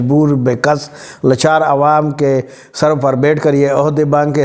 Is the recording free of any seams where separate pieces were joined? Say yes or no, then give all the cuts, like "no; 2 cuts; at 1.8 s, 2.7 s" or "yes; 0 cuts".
yes; 0 cuts